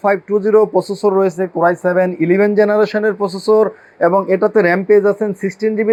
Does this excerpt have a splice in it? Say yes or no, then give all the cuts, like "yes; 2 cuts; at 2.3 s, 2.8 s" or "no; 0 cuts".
no; 0 cuts